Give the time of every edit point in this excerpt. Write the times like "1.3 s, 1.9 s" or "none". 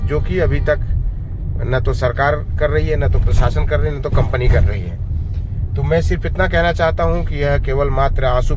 none